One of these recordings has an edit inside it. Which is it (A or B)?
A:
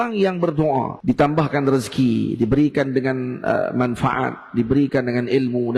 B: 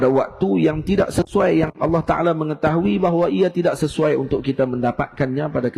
A